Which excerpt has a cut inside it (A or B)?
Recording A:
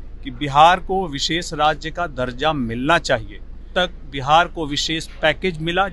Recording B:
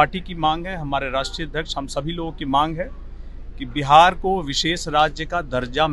A